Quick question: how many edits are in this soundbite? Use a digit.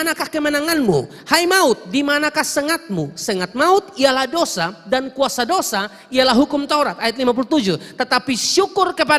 0